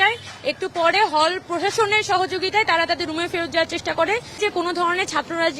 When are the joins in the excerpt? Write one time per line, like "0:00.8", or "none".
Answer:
0:04.4